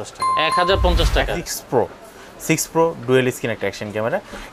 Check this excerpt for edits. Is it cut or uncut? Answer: cut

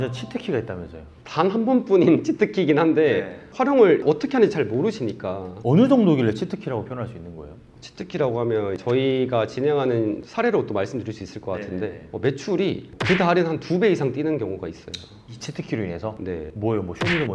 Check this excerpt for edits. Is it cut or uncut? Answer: uncut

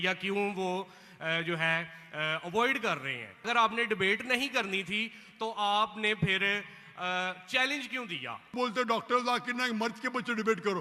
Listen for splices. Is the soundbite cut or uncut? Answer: cut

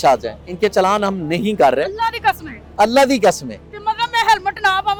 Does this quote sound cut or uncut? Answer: uncut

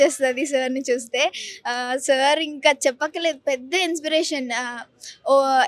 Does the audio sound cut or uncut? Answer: uncut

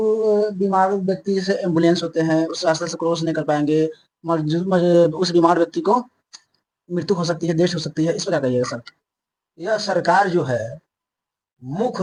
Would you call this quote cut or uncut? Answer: uncut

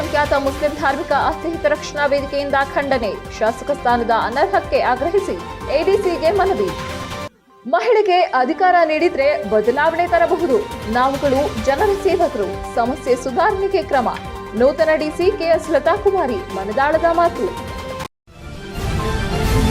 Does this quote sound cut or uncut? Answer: cut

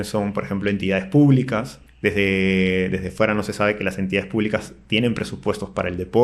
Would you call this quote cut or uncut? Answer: cut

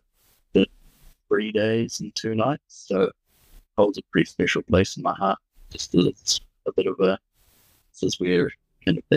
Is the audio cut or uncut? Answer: cut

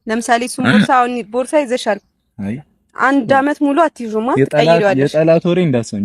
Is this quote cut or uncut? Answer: uncut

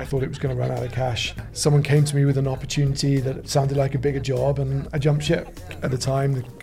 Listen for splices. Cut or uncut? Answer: cut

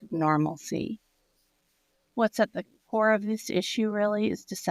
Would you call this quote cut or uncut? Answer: uncut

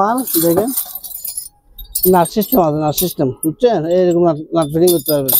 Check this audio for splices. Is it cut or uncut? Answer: uncut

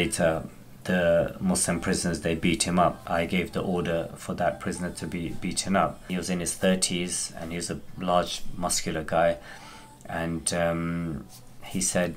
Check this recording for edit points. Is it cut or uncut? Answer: cut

